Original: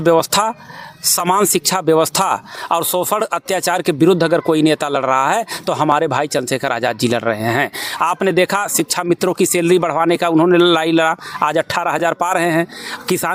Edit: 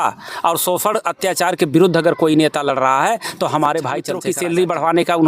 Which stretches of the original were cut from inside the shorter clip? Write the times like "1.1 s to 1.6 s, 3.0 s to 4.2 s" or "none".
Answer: 6.5 s to 9.3 s